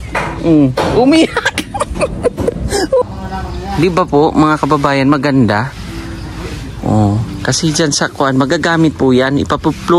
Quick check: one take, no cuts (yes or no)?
no